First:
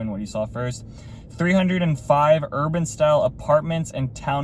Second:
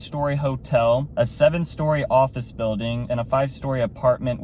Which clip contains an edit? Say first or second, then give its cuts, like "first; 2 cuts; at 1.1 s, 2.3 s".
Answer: second; 2 cuts; at 1.1 s, 3.0 s